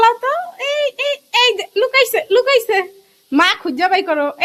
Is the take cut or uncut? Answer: uncut